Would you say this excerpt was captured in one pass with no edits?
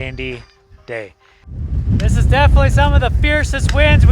no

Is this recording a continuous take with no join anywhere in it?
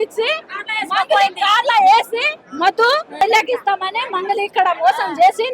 no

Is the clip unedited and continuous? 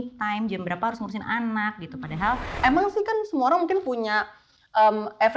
no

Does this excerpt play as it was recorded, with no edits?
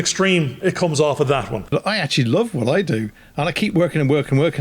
no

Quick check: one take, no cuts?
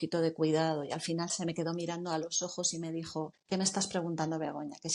no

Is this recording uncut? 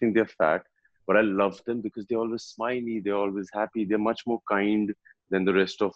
yes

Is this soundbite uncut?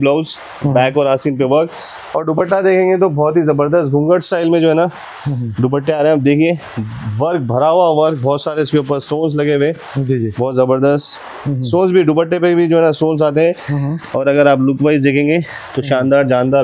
yes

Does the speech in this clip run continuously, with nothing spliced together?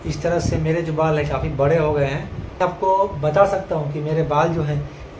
no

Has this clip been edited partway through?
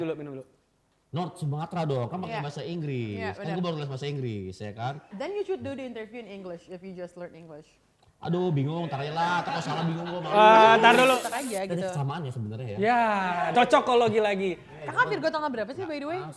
yes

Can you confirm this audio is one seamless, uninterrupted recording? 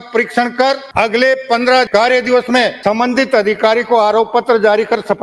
no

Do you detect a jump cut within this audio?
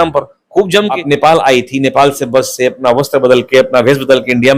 yes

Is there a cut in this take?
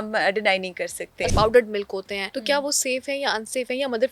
yes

